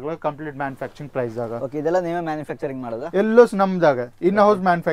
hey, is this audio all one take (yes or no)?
yes